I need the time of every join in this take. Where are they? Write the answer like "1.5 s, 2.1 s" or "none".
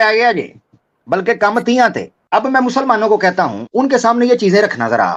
2.1 s, 3.6 s